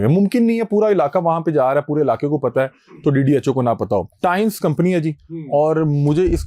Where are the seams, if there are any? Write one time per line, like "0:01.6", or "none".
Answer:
0:04.1